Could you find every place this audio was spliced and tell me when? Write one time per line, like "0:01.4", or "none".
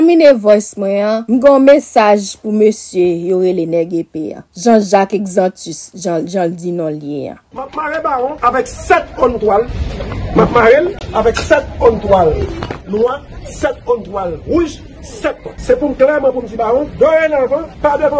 0:01.2

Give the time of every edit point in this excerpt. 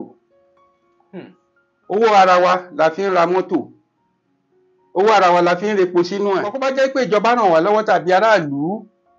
0:06.5

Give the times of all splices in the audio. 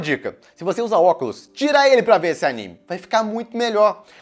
none

